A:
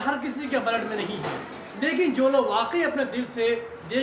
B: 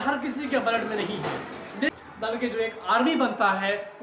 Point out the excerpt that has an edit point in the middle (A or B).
B